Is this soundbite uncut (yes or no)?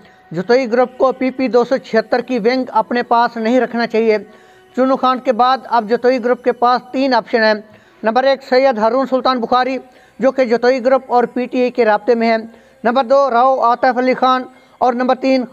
yes